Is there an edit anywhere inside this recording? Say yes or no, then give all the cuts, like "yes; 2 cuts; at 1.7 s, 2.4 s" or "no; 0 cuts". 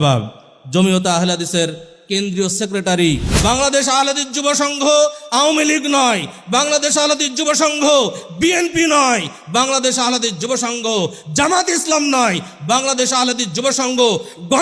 yes; 1 cut; at 3.3 s